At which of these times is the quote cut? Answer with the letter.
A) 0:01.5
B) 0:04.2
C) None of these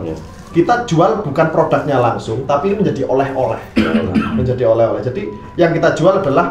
C